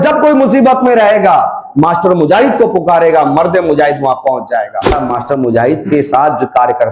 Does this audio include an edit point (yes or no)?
yes